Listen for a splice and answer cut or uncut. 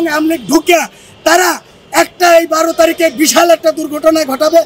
uncut